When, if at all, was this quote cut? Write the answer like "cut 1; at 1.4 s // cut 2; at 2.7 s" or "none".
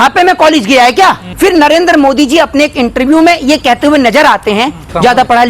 cut 1; at 1.3 s